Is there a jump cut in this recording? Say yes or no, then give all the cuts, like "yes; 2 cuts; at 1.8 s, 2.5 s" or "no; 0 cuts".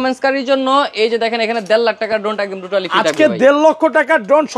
no; 0 cuts